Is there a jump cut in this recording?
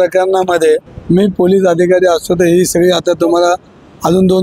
yes; 1 cut; at 0.9 s

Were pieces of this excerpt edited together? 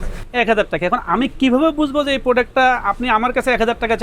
no; 0 cuts

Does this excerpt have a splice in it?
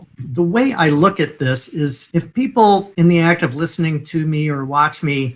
no; 0 cuts

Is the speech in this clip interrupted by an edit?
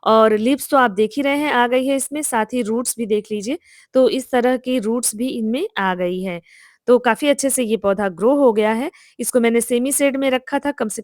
no; 0 cuts

